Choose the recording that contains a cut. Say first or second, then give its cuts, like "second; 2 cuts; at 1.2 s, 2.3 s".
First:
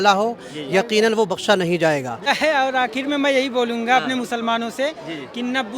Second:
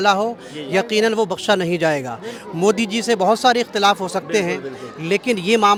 first; 1 cut; at 2.3 s